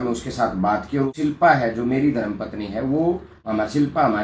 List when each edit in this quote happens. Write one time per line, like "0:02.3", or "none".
0:01.3
0:03.3

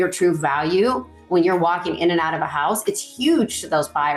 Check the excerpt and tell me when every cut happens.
none

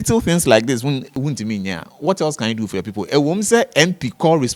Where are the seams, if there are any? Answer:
0:01.1

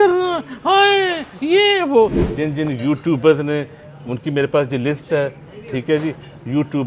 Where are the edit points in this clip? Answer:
0:02.2

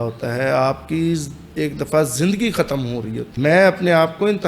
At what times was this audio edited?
0:03.2

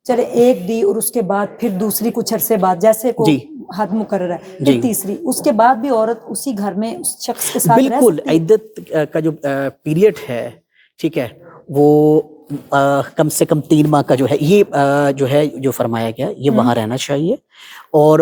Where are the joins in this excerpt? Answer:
none

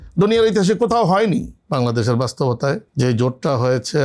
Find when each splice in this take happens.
0:01.6
0:02.9

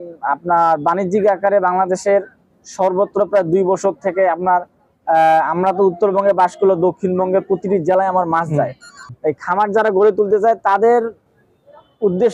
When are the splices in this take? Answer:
0:09.2

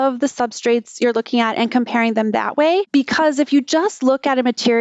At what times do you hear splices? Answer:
0:02.9

